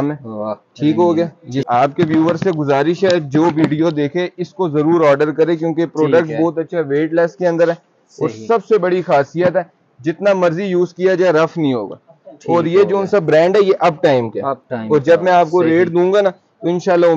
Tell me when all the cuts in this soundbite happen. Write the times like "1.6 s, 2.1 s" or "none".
1.6 s